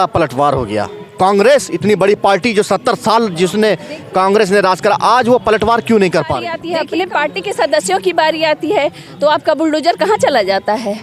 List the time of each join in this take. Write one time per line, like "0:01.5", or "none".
0:06.6